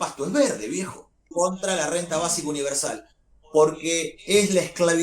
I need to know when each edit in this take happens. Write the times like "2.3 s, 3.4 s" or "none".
1.2 s